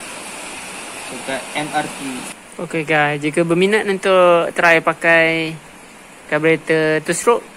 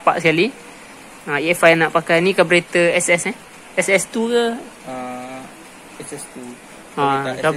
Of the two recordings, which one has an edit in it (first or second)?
first